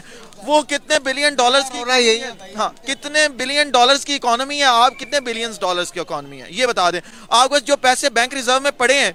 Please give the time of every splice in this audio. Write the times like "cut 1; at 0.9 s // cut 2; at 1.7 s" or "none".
none